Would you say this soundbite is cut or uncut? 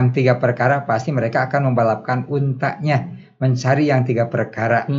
uncut